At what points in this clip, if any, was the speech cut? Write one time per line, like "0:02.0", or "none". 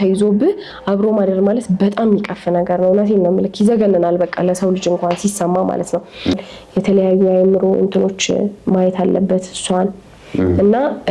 0:06.4